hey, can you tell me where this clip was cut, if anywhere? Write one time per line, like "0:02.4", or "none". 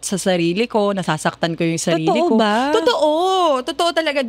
none